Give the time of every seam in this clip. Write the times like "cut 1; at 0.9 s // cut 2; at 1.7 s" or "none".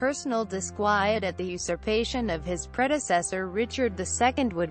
cut 1; at 1.2 s